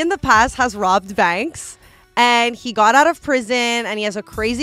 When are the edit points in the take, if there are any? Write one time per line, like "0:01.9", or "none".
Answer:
none